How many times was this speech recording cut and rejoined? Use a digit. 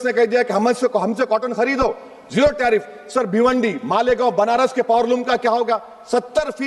0